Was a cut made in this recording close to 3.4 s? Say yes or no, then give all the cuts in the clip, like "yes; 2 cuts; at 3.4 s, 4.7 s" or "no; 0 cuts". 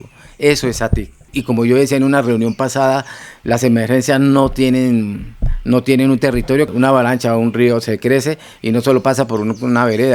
no; 2 cuts; at 1.3 s, 6.7 s